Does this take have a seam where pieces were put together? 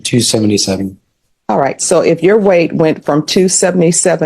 no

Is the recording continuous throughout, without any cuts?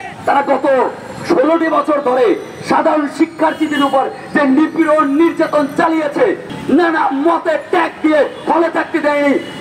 no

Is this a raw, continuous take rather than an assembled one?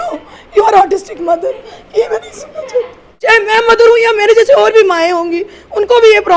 no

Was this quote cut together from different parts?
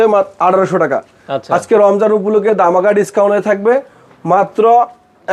no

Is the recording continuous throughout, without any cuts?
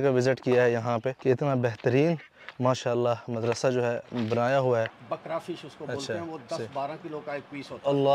no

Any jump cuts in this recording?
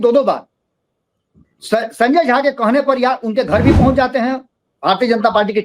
yes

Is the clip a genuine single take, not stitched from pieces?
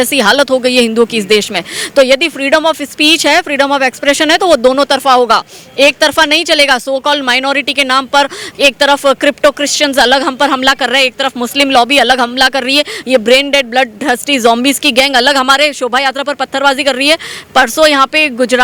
yes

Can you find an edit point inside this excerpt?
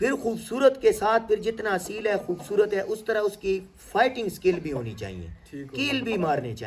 no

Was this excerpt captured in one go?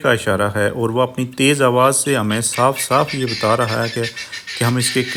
yes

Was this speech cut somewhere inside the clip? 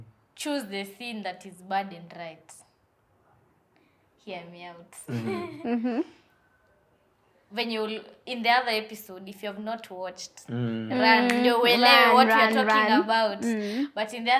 no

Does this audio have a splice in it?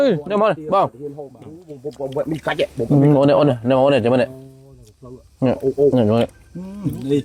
no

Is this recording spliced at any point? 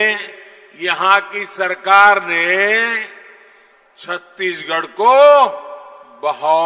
no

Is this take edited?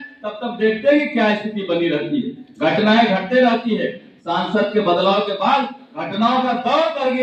no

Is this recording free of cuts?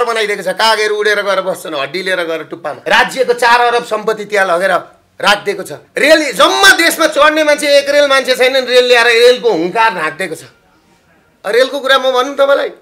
no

